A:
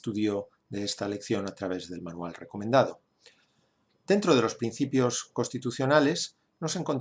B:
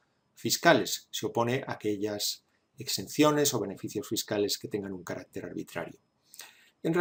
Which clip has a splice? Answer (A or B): A